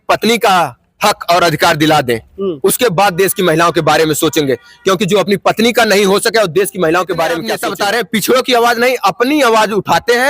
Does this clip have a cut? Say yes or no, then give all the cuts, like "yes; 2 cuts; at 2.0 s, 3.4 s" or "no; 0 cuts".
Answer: yes; 1 cut; at 7.6 s